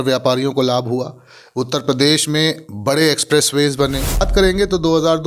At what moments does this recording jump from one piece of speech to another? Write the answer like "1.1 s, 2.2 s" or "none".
4.3 s